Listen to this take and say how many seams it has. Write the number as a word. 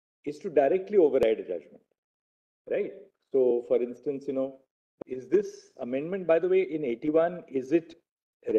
one